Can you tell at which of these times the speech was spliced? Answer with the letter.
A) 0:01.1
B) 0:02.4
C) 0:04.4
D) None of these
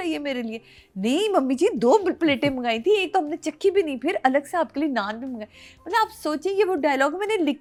D